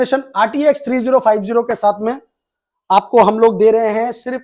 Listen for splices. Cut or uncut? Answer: uncut